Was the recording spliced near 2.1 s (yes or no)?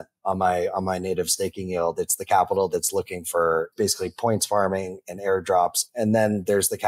no